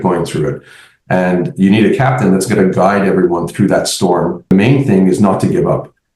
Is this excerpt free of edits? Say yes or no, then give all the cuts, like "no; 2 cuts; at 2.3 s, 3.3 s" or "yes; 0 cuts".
no; 1 cut; at 4.5 s